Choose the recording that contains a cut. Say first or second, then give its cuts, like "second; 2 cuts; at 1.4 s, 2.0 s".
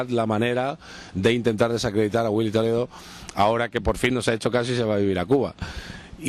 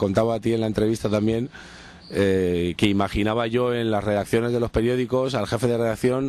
second; 1 cut; at 2.6 s